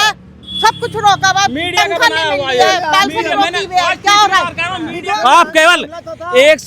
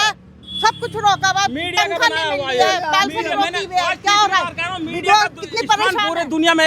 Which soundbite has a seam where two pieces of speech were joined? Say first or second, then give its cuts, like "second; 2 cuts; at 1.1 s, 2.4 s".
first; 1 cut; at 4.9 s